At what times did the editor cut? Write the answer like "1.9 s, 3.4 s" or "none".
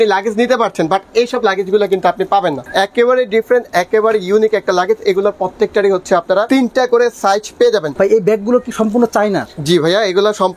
2.6 s, 6.5 s, 7.9 s